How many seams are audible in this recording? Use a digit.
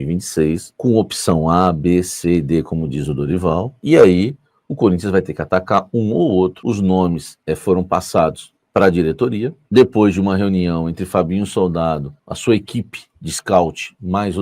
1